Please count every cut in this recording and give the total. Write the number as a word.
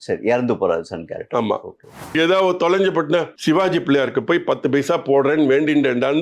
two